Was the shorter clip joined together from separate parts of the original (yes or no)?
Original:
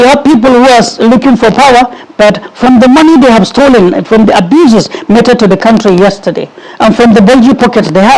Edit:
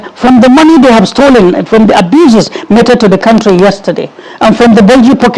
no